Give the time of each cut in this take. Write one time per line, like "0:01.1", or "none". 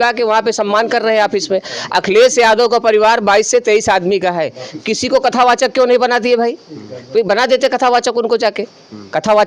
none